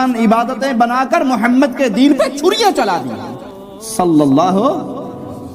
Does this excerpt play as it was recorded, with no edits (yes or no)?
no